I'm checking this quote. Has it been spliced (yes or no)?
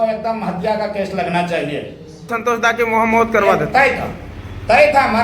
yes